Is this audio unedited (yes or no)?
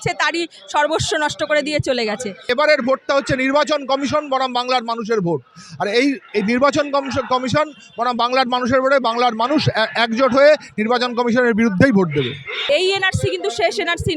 no